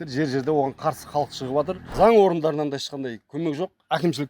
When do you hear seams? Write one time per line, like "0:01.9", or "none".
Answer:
0:01.9